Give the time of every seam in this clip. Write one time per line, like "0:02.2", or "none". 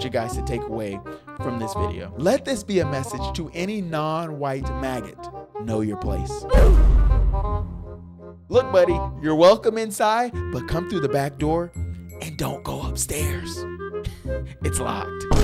none